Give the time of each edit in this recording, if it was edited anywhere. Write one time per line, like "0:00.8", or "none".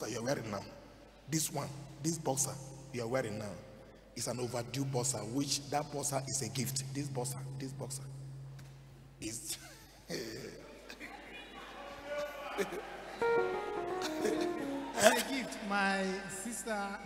none